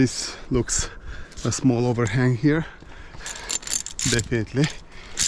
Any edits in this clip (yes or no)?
no